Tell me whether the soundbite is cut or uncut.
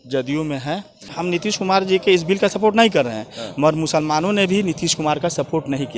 cut